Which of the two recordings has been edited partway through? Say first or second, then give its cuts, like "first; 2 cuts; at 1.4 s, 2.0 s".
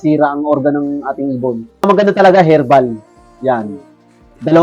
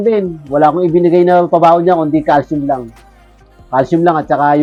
first; 1 cut; at 1.9 s